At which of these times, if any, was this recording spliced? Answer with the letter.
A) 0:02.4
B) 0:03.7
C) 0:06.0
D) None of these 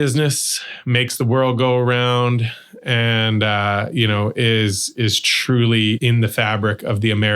C